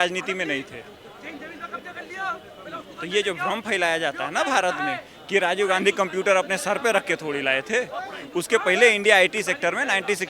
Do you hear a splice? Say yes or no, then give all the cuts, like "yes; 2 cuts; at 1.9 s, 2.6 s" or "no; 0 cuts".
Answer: no; 0 cuts